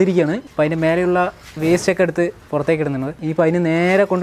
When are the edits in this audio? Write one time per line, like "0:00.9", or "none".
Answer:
0:03.2